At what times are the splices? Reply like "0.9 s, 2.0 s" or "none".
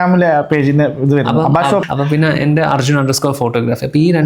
1.8 s